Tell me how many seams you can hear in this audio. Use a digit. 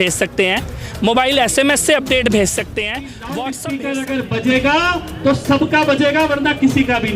1